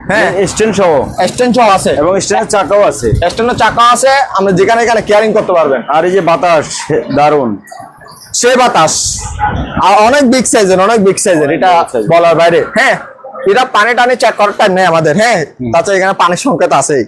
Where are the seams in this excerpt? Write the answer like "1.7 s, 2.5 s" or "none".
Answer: none